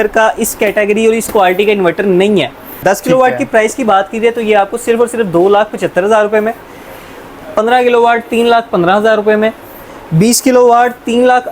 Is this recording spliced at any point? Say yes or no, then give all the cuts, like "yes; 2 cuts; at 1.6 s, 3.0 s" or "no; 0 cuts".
yes; 1 cut; at 2.8 s